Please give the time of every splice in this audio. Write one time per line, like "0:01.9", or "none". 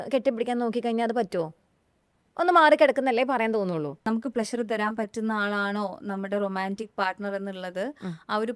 0:04.0